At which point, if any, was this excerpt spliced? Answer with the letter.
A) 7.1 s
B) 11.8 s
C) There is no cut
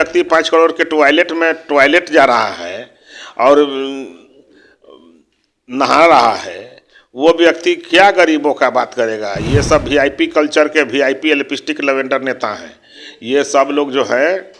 C